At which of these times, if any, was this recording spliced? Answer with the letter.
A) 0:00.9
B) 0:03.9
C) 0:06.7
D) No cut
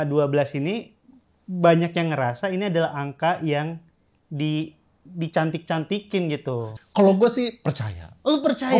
C